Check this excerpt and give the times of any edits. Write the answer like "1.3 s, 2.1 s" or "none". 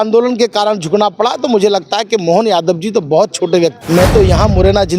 3.8 s